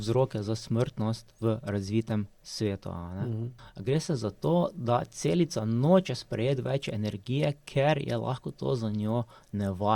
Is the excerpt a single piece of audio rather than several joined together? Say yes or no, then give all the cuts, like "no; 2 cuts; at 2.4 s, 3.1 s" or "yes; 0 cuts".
no; 1 cut; at 3.7 s